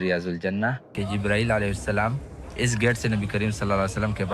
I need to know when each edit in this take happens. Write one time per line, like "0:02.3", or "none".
0:01.0